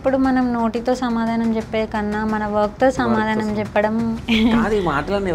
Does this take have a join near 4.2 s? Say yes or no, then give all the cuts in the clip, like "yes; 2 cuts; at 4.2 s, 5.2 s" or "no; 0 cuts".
yes; 1 cut; at 4.2 s